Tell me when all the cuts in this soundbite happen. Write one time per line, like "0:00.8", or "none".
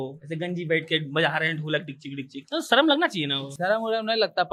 none